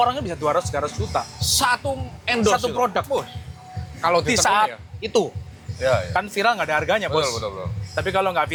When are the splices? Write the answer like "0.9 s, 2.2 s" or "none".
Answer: none

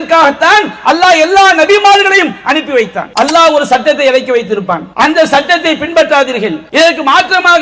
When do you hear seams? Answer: 3.0 s, 4.9 s, 6.6 s

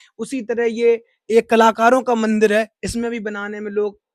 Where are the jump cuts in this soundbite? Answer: none

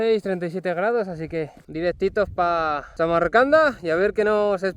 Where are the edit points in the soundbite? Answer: 1.6 s, 2.8 s

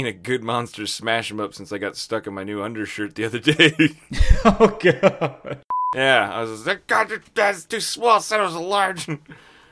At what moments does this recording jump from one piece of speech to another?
5.8 s

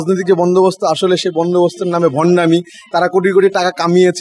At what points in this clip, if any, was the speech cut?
none

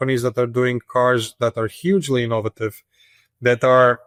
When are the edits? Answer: none

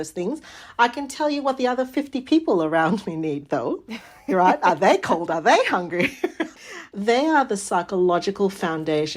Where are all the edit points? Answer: 6.5 s

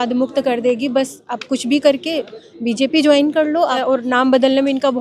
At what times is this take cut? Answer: 3.8 s

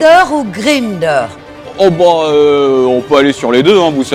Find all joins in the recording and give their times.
none

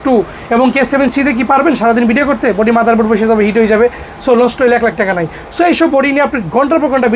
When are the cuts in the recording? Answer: none

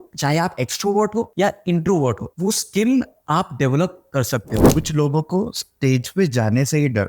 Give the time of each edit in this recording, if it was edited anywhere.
1.3 s, 2.3 s, 4.6 s

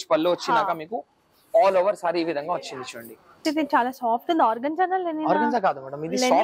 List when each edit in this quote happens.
3.4 s

